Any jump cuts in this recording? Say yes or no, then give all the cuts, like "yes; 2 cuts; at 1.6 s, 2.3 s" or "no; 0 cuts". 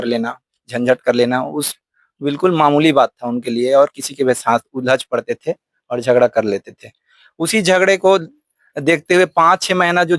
no; 0 cuts